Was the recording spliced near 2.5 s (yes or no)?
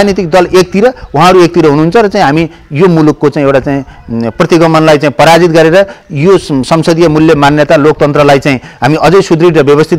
no